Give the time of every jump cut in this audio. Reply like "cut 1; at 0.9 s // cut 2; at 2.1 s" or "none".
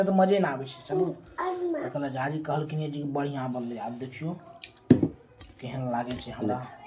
none